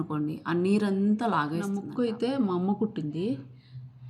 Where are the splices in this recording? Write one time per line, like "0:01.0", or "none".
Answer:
0:01.6